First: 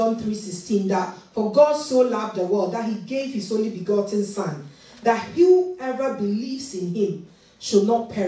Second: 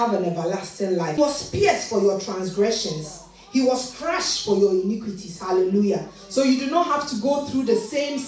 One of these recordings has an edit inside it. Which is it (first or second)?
second